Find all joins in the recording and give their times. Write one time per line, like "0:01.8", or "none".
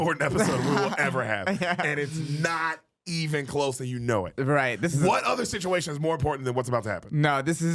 none